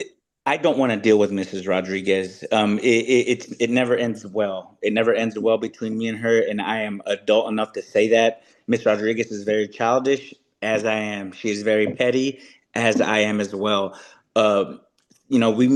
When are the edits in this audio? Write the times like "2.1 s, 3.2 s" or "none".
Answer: none